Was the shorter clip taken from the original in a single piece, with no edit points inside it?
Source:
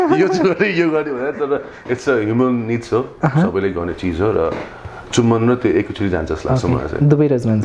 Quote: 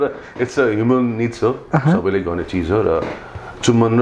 yes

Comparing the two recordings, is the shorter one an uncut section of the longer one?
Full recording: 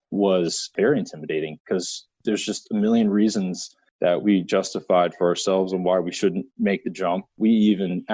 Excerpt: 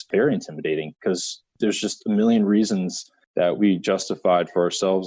yes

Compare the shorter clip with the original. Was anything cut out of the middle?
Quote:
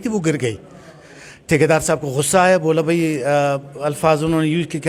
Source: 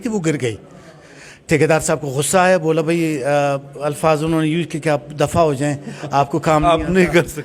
no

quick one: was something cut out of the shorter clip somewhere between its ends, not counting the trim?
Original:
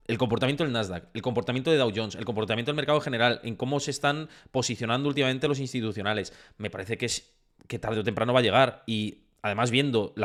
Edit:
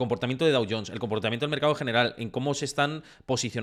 no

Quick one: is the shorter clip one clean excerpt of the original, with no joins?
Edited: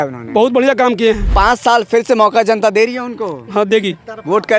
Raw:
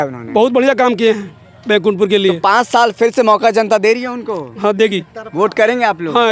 no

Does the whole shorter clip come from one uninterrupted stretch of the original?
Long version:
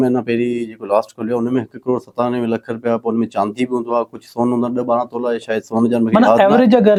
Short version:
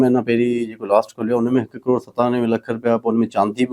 yes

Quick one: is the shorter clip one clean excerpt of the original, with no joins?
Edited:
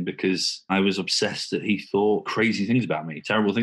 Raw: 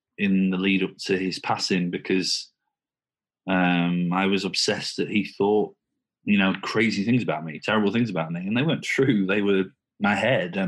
no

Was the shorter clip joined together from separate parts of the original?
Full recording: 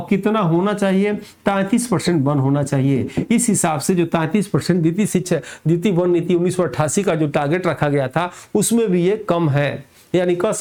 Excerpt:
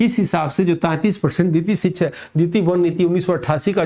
no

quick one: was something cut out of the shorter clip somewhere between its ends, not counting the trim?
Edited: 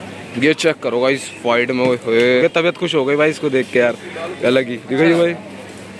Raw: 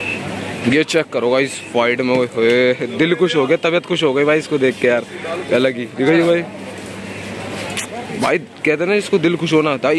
yes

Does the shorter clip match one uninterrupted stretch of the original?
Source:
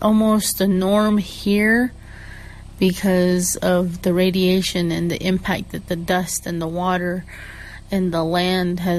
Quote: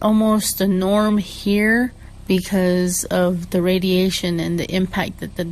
no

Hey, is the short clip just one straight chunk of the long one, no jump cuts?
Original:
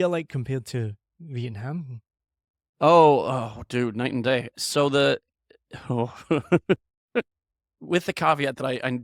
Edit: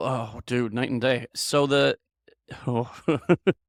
yes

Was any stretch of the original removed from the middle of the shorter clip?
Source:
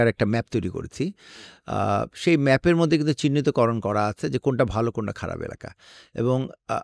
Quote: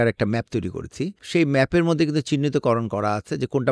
yes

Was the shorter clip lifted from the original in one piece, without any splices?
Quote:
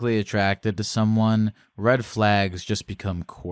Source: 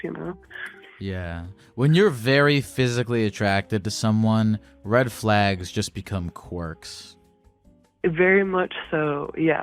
yes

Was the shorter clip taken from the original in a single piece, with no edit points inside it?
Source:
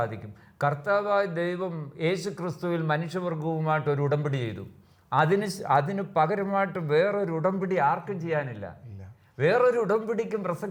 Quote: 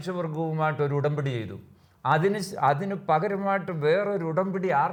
yes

